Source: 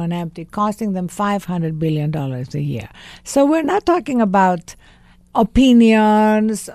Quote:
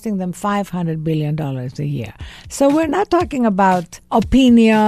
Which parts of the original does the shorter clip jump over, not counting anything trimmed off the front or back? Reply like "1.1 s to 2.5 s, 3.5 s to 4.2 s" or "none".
4.7 s to 5.2 s